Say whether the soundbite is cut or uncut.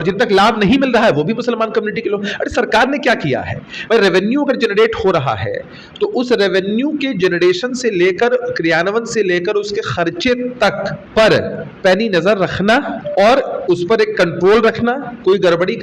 cut